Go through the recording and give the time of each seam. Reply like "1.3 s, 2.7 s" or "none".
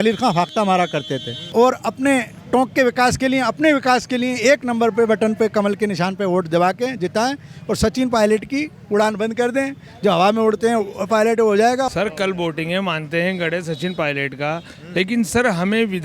1.3 s, 11.9 s